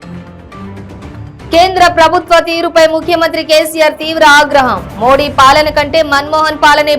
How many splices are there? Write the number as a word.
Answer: one